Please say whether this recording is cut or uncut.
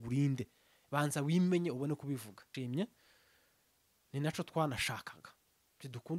cut